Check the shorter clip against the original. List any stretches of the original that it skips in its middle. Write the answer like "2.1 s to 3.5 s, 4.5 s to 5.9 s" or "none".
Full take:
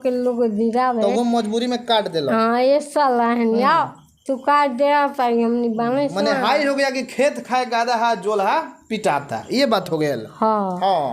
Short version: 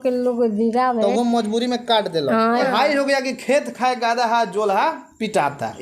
2.6 s to 6.3 s